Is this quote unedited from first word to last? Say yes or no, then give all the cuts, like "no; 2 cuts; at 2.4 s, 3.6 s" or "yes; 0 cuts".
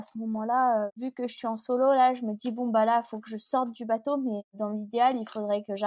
no; 2 cuts; at 1.0 s, 4.5 s